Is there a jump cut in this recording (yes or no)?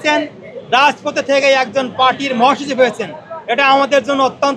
no